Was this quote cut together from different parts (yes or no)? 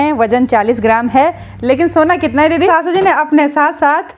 yes